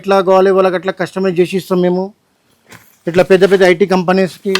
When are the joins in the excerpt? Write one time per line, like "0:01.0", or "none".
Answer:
none